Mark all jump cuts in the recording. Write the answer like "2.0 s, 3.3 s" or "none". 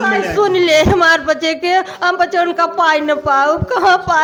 none